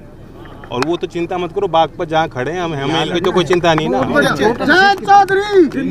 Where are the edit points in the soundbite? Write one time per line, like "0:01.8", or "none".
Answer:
0:03.0